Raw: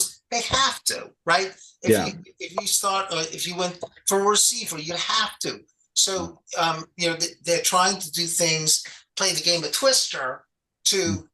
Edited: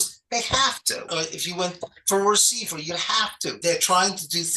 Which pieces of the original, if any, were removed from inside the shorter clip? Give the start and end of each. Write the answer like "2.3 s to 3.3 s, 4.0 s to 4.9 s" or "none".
1.1 s to 3.1 s, 5.6 s to 7.4 s